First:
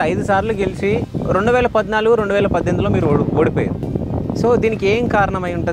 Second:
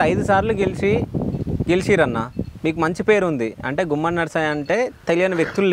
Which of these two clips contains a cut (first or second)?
first